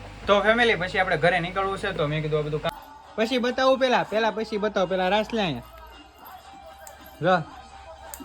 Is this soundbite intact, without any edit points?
no; 1 cut; at 2.7 s

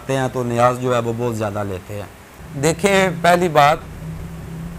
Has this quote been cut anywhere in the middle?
no; 0 cuts

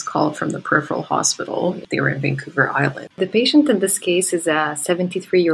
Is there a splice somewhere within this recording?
yes; 2 cuts; at 1.8 s, 3.2 s

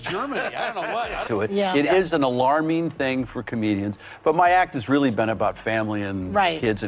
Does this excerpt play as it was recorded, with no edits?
no; 1 cut; at 1.2 s

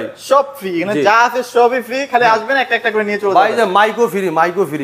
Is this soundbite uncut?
yes; 0 cuts

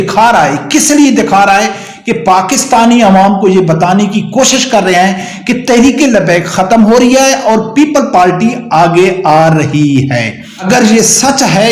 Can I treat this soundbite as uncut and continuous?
no; 1 cut; at 10.5 s

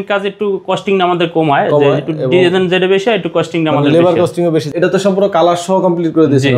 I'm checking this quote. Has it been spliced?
yes; 1 cut; at 4.7 s

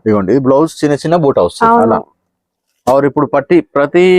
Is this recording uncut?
no; 1 cut; at 1.6 s

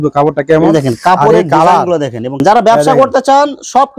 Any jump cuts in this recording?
yes; 1 cut; at 2.4 s

